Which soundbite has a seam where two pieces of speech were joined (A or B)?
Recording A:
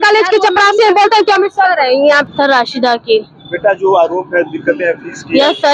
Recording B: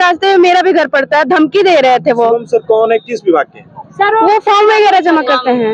A